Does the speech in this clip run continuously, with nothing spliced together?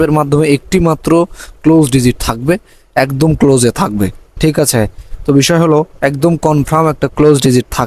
yes; 0 cuts

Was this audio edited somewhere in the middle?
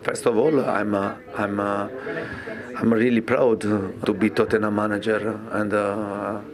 no; 0 cuts

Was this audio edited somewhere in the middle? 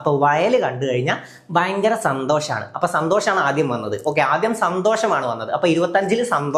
no; 0 cuts

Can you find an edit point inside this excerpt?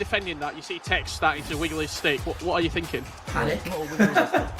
yes; 1 cut; at 3.2 s

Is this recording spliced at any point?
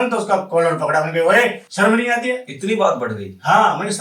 yes; 1 cut; at 1.6 s

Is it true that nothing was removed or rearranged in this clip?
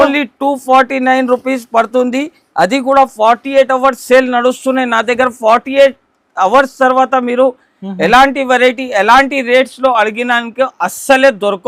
yes; 0 cuts

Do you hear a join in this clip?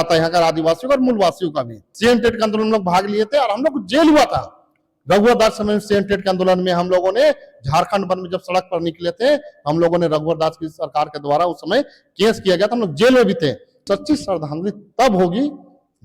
yes; 2 cuts; at 1.8 s, 13.8 s

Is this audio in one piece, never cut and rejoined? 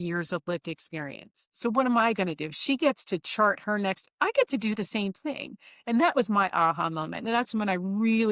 yes; 0 cuts

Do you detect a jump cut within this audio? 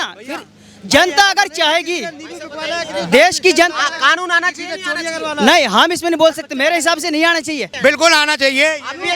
yes; 1 cut; at 7.6 s

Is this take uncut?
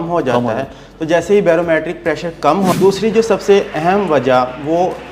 no; 1 cut; at 2.8 s

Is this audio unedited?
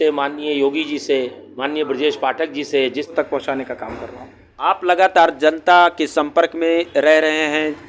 no; 1 cut; at 3.1 s

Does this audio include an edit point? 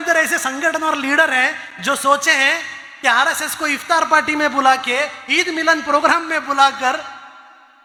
no; 0 cuts

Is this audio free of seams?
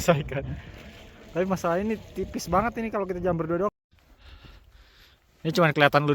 no; 1 cut; at 3.9 s

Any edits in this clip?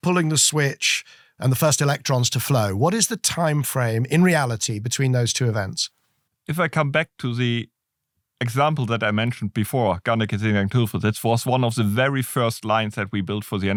no; 0 cuts

